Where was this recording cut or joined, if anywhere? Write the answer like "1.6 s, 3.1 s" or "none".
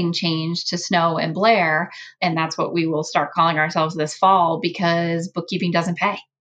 2.0 s